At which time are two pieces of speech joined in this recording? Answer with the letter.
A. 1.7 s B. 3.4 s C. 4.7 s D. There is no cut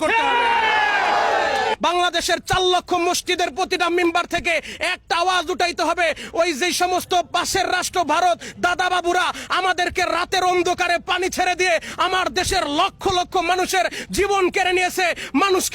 A